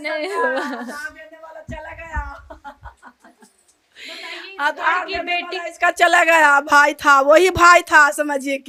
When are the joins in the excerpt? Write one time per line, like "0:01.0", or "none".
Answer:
none